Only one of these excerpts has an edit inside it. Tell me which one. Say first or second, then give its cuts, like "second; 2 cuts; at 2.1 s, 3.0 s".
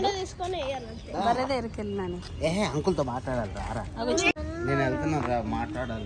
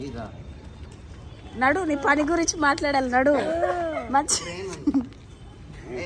first; 1 cut; at 4.3 s